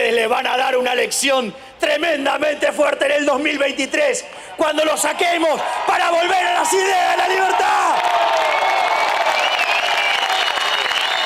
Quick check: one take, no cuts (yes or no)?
yes